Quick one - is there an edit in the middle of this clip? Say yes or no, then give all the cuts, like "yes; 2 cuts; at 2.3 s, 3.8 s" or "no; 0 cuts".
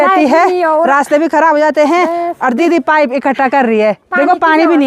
no; 0 cuts